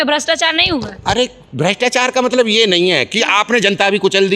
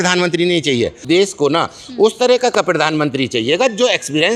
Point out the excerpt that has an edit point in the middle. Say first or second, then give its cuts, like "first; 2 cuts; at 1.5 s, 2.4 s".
second; 1 cut; at 1.0 s